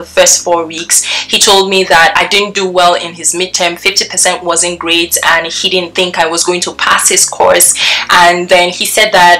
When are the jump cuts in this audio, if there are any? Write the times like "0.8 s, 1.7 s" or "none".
none